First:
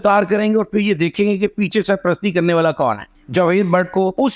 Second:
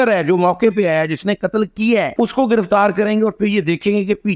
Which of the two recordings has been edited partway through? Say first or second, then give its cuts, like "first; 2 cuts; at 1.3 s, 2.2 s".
first; 1 cut; at 3.2 s